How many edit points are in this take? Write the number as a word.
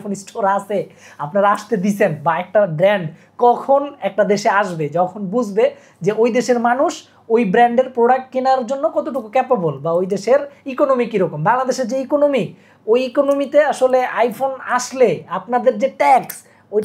zero